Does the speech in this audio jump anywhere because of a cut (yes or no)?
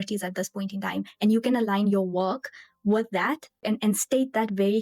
yes